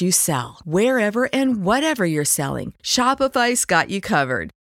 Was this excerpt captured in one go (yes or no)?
yes